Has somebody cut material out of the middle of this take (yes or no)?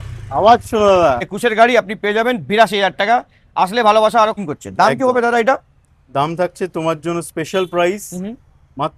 yes